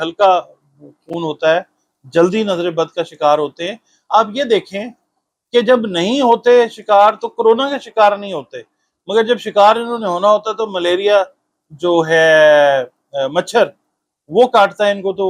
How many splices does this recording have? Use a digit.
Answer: 0